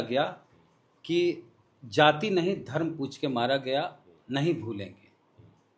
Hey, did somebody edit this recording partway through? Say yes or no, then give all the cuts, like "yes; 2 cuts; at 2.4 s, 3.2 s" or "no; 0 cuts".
no; 0 cuts